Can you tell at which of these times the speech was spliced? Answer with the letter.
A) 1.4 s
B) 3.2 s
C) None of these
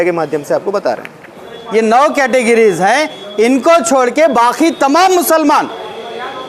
A